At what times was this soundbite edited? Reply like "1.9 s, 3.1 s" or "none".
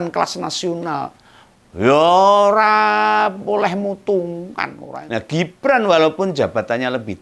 4.8 s